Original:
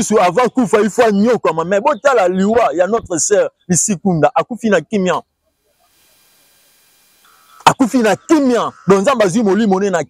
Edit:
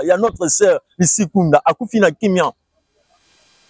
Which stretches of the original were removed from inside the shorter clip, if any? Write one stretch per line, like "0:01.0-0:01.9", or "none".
none